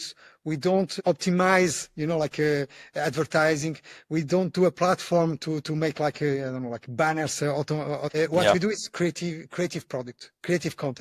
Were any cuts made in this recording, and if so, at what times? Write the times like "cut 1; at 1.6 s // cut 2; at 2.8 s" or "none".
cut 1; at 1.0 s // cut 2; at 8.1 s

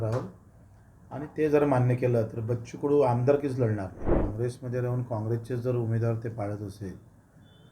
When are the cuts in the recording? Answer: cut 1; at 4.0 s

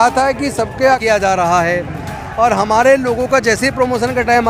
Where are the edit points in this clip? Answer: cut 1; at 1.0 s

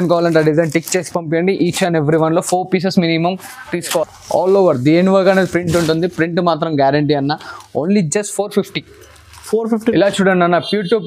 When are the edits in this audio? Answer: cut 1; at 4.0 s // cut 2; at 9.8 s

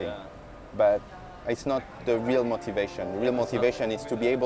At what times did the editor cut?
none

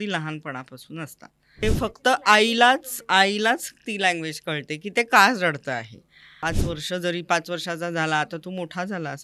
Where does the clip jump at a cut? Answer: cut 1; at 1.6 s // cut 2; at 6.4 s

